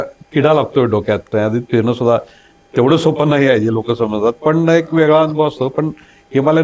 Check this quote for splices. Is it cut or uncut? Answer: cut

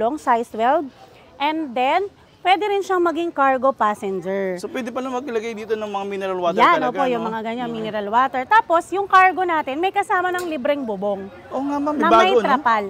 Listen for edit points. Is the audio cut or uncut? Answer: uncut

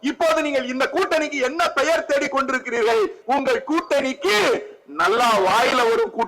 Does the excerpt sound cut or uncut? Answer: cut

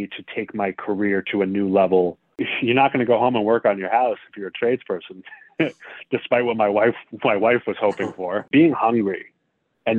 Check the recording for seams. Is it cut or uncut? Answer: cut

